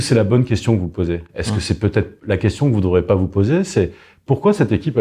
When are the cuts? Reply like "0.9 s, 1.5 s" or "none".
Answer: none